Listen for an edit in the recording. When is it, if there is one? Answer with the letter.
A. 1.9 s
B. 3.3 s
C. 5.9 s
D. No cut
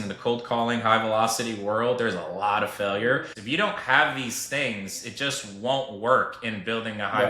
B